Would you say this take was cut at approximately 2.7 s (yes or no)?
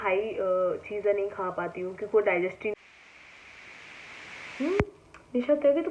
yes